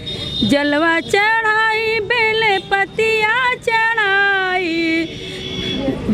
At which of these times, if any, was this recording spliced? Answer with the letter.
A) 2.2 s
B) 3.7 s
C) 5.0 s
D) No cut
D